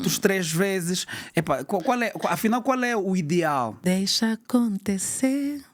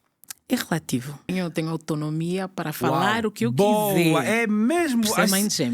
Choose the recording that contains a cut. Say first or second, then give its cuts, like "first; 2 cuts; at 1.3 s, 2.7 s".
second; 1 cut; at 1.3 s